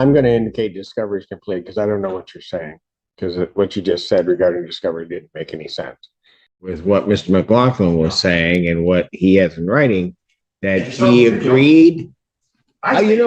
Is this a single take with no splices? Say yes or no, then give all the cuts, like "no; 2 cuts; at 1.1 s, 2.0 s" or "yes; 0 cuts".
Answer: no; 1 cut; at 6.8 s